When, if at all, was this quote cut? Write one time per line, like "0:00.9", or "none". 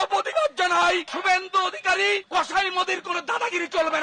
0:01.1

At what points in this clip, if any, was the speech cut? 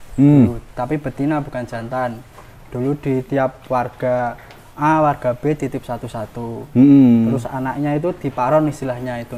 none

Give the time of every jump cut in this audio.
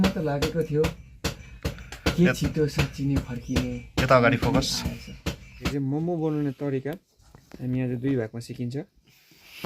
0:05.7

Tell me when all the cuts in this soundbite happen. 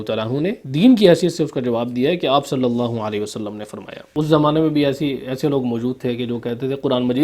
0:04.0

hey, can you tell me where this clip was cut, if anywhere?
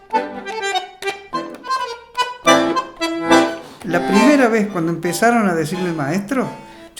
0:03.8

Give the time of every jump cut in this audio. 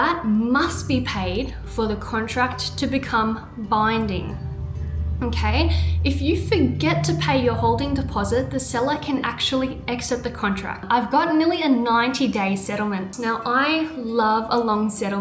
0:10.8
0:13.1

